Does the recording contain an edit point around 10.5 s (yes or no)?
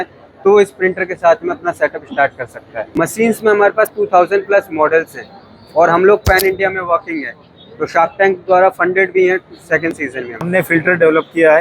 yes